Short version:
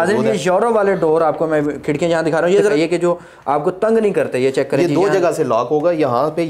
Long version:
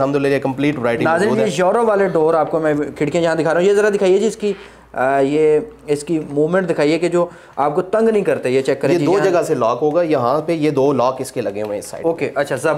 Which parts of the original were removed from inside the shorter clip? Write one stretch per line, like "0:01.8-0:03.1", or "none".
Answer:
0:03.9-0:06.8